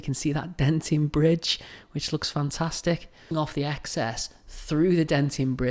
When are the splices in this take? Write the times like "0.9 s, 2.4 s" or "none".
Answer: 3.3 s